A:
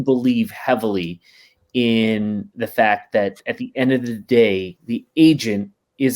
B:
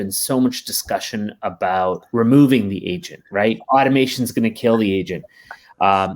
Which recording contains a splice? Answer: B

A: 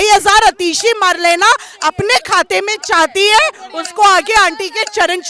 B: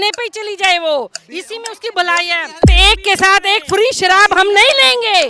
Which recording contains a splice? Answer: B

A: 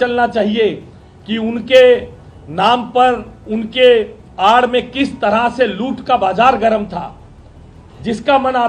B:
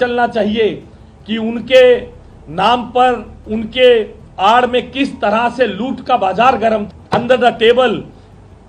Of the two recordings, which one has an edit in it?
B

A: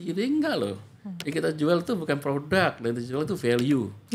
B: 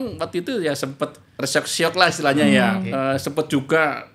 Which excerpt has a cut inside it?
B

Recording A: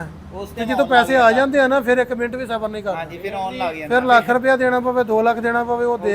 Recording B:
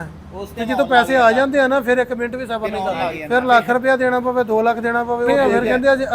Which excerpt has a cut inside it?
B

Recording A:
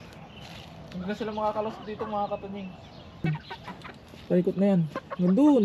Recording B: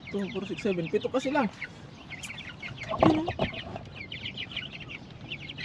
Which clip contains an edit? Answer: A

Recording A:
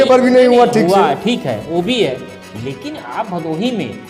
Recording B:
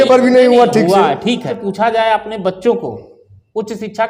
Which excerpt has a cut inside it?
B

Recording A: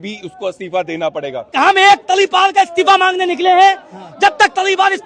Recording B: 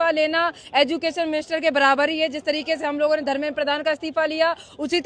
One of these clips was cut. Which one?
A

